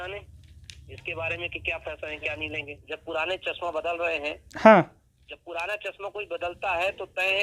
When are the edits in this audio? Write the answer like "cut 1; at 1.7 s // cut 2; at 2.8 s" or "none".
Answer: cut 1; at 2.7 s